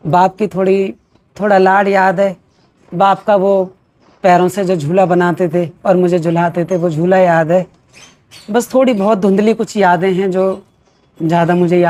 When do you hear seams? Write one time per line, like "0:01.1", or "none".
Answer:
none